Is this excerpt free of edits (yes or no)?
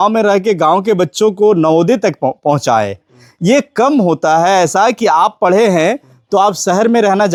yes